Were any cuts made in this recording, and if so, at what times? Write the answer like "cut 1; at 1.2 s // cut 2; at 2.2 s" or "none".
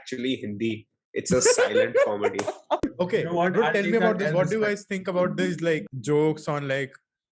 cut 1; at 2.9 s // cut 2; at 5.9 s